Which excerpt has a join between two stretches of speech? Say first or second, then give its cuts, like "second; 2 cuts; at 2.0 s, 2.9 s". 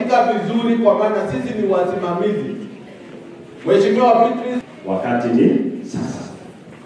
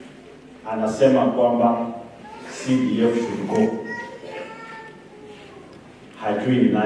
first; 1 cut; at 4.5 s